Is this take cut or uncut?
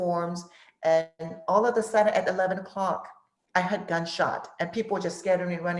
uncut